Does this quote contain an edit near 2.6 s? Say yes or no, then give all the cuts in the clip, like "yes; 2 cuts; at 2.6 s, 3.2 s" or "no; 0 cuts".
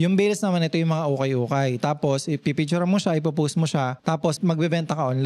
no; 1 cut; at 4.3 s